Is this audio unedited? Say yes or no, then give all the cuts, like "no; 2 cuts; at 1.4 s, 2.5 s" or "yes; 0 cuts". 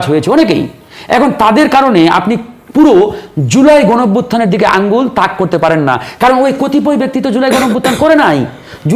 yes; 0 cuts